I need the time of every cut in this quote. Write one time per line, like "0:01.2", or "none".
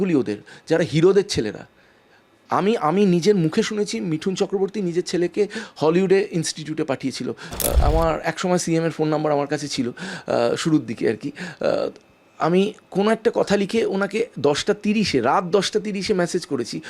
0:07.8